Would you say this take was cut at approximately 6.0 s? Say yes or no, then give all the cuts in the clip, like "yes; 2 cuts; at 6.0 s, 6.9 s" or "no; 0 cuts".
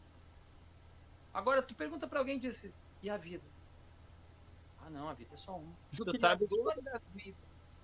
yes; 1 cut; at 6.0 s